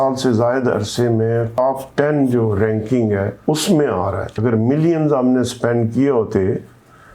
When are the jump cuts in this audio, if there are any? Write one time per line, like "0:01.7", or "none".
0:01.5
0:03.3
0:04.4